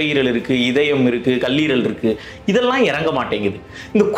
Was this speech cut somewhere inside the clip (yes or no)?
no